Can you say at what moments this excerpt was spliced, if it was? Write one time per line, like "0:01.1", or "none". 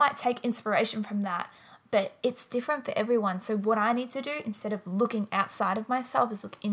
none